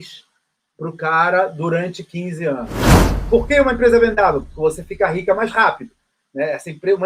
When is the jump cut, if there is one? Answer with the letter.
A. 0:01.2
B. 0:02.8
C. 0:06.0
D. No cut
B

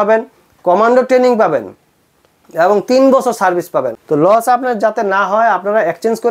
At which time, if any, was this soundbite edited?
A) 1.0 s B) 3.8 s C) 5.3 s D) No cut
B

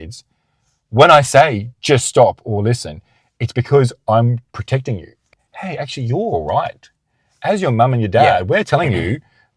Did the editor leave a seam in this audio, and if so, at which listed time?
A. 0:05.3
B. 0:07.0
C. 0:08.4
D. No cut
A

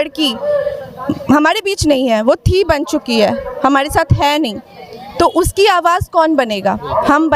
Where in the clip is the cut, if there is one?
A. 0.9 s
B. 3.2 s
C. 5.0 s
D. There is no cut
D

